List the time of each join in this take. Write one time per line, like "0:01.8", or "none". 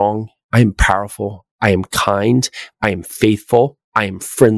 none